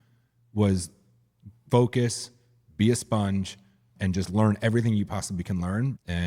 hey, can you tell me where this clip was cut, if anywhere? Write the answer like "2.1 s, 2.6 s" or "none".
3.9 s